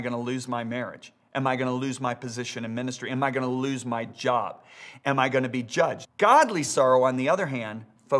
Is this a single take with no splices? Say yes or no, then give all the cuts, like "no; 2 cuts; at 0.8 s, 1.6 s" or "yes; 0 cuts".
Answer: no; 1 cut; at 6.0 s